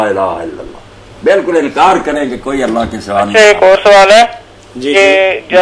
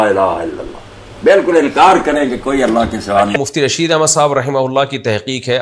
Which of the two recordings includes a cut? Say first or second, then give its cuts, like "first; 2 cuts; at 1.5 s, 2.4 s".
second; 1 cut; at 3.3 s